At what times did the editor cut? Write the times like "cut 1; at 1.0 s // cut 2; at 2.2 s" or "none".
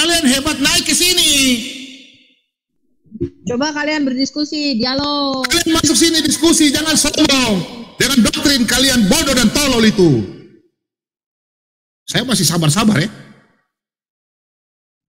cut 1; at 2.7 s